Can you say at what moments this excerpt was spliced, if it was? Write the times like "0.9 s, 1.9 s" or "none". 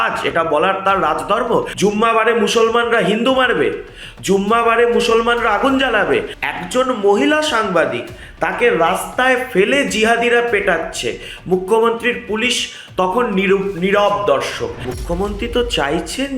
1.7 s, 6.4 s, 14.8 s

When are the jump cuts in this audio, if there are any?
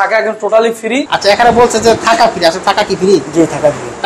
1.1 s

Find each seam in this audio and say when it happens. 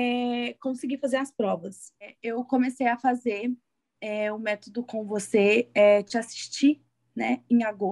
2.1 s

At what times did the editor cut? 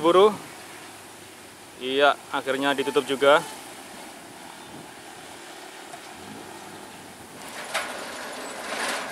7.6 s

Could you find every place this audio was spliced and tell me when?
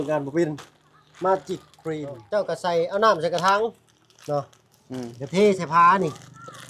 2.2 s

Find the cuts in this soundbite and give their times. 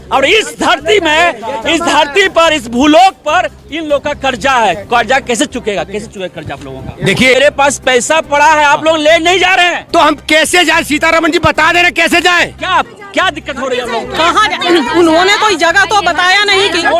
7.4 s

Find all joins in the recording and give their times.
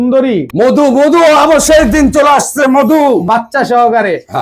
3.2 s

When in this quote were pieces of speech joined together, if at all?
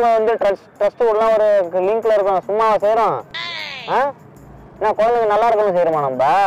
none

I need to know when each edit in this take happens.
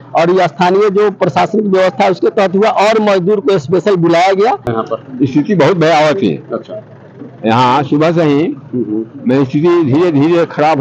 4.7 s

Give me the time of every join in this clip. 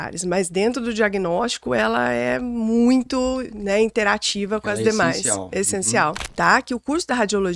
6.2 s

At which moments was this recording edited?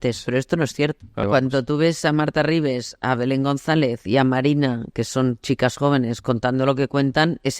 1.2 s

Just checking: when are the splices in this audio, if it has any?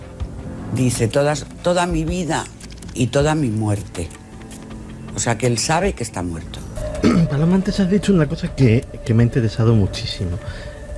6.8 s

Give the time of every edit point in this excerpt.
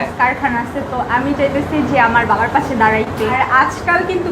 3.4 s

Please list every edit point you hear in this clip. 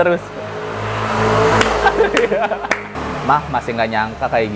2.9 s

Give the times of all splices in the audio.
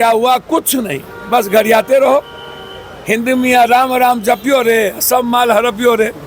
none

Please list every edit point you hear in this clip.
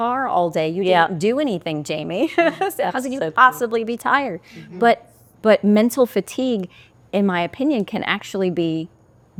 none

